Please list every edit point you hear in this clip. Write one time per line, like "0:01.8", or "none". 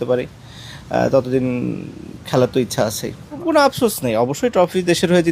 0:03.4